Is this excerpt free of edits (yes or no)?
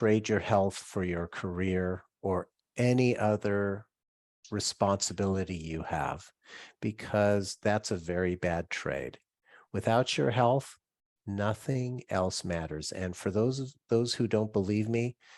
yes